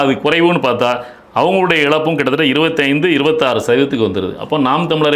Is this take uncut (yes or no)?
yes